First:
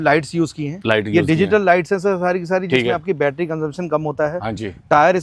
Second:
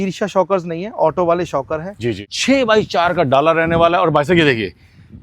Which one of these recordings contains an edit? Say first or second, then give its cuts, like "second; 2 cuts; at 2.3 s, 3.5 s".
second; 1 cut; at 2.2 s